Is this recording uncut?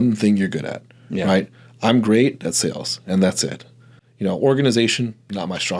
yes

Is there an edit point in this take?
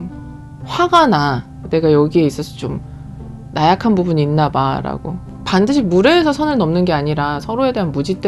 yes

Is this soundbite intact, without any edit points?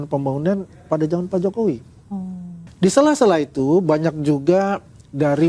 no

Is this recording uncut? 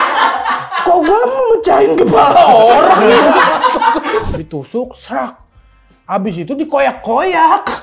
no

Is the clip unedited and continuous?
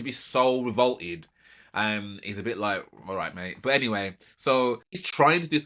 yes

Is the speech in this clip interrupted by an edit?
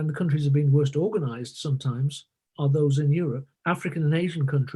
yes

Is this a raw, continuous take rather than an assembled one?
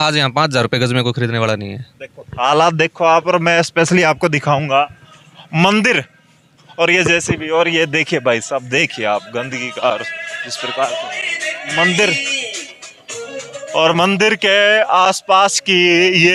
yes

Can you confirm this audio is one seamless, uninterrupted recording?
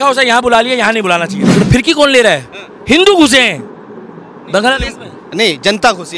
no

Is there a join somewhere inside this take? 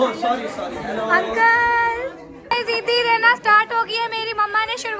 yes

